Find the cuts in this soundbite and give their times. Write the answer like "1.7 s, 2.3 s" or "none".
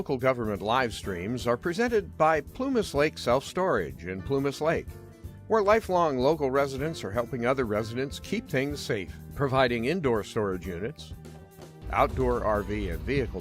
none